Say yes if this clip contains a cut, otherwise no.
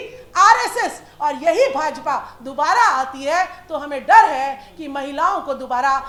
no